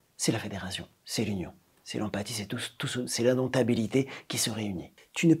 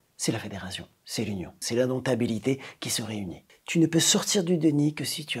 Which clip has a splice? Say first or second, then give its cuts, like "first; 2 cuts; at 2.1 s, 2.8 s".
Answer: second; 1 cut; at 1.6 s